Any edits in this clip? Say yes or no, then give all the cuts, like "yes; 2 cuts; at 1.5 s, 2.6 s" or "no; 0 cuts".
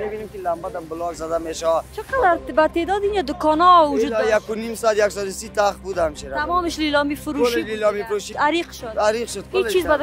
yes; 2 cuts; at 2.0 s, 8.3 s